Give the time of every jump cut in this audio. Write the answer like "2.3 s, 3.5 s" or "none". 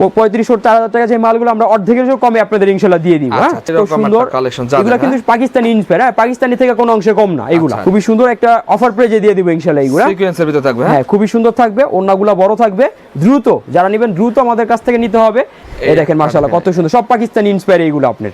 3.7 s, 7.8 s, 15.6 s

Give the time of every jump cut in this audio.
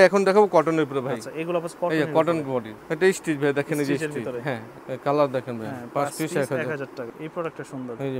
2.8 s, 4.7 s, 7.1 s

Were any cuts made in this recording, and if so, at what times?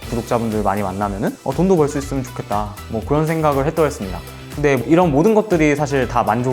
4.8 s

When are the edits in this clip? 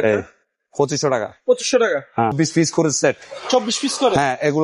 2.3 s

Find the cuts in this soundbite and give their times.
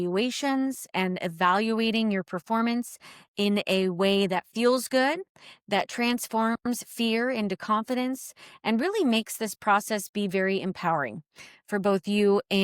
none

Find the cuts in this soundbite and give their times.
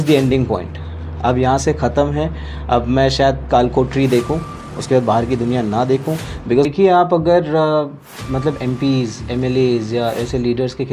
6.7 s

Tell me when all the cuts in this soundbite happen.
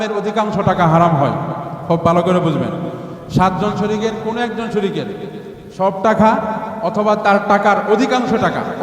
none

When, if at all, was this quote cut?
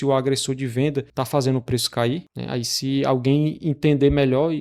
1.1 s, 2.3 s

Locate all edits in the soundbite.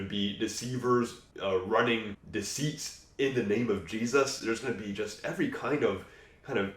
1.2 s, 2.2 s

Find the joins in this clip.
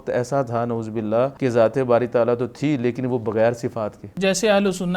1.3 s, 4.1 s

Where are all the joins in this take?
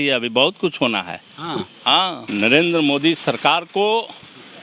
2.2 s

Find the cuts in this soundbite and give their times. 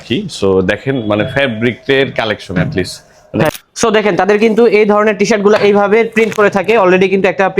3.5 s

